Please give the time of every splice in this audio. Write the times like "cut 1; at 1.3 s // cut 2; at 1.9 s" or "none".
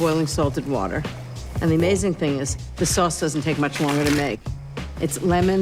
cut 1; at 1.6 s